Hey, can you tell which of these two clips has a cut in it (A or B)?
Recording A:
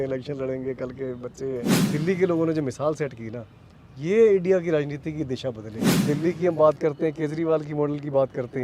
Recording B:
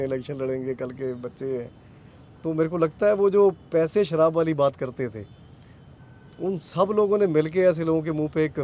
A